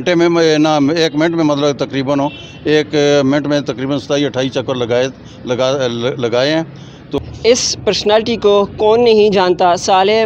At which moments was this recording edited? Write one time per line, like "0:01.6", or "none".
0:07.2

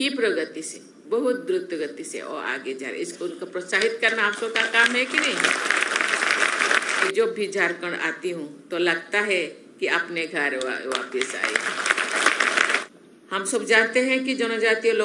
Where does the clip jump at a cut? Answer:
0:06.9
0:12.8

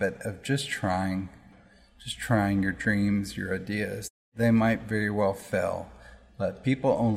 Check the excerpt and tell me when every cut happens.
0:01.5
0:04.3

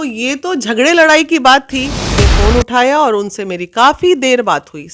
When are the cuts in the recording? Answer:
0:02.1

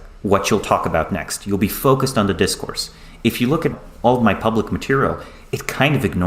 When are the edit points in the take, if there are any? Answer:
0:03.7

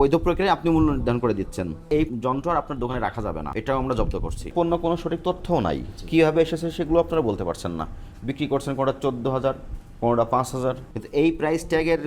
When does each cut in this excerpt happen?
0:02.0
0:03.5
0:04.5
0:10.9

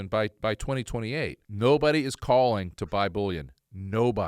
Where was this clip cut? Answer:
0:01.4

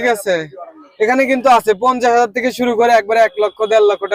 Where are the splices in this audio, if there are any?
none

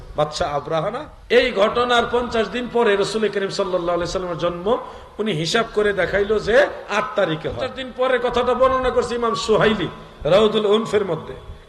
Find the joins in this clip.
0:01.1
0:07.8

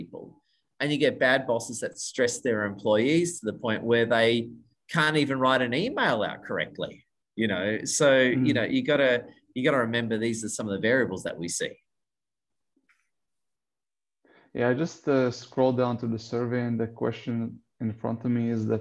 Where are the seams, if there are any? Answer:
none

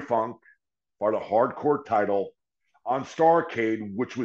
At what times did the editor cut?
none

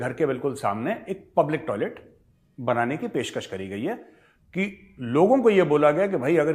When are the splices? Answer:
none

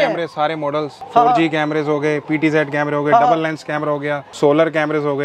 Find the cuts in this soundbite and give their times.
none

